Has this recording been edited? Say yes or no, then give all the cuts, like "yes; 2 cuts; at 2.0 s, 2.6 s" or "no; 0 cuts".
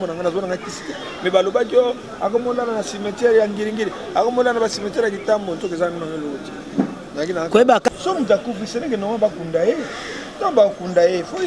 yes; 1 cut; at 7.9 s